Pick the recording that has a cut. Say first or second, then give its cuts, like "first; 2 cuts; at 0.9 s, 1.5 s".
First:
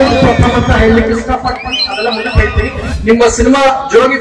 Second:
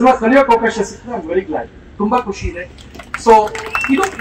first; 1 cut; at 2.8 s